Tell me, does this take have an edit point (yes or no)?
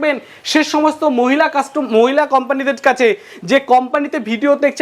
no